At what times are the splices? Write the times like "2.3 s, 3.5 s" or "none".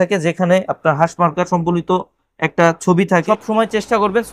3.2 s

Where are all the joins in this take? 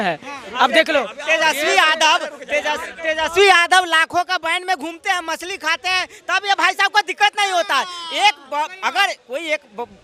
none

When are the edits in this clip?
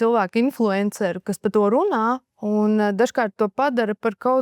2.3 s

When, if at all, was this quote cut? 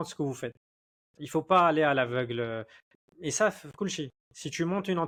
none

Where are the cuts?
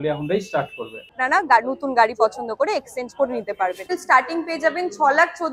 1.2 s, 3.9 s

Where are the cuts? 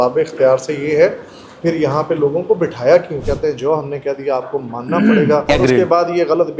3.2 s, 5.4 s

